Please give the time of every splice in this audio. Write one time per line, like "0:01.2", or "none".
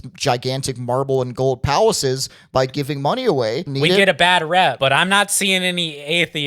0:03.7
0:04.8